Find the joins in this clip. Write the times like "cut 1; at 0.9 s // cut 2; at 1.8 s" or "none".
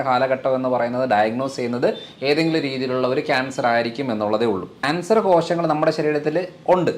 cut 1; at 4.8 s